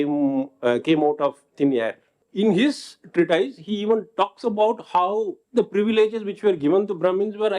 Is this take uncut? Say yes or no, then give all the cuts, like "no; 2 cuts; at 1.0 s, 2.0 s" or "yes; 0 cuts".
no; 2 cuts; at 2.2 s, 5.4 s